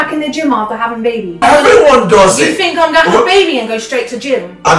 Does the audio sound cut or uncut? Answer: cut